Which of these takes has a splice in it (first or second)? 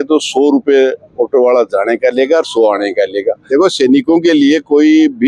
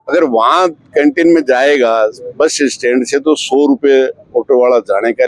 first